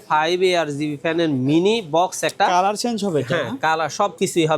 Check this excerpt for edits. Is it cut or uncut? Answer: uncut